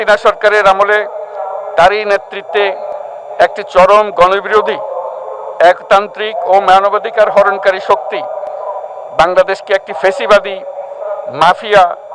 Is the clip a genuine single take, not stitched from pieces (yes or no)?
yes